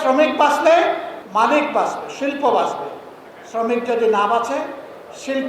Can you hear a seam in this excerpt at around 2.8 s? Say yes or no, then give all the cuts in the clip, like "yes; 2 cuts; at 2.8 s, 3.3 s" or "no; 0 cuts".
no; 1 cut; at 1.1 s